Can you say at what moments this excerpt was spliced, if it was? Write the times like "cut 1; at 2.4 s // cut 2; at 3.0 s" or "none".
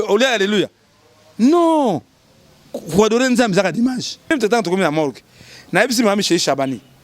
cut 1; at 4.3 s